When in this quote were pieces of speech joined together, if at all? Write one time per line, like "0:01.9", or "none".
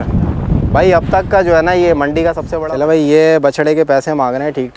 0:02.5